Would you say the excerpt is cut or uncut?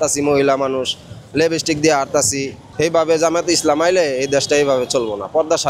cut